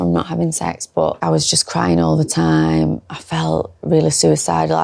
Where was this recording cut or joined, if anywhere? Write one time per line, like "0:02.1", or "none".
0:01.2